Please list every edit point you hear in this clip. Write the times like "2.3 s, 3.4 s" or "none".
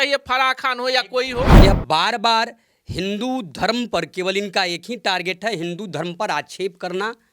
1.5 s